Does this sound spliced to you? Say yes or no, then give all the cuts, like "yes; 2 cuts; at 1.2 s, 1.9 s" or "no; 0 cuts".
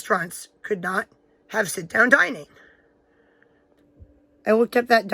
yes; 1 cut; at 3.8 s